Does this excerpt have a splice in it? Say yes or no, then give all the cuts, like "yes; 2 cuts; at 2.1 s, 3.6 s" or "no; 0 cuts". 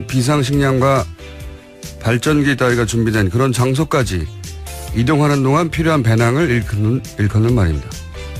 yes; 1 cut; at 5.7 s